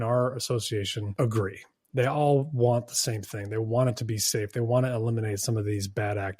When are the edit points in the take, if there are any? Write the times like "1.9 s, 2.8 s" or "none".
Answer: 1.0 s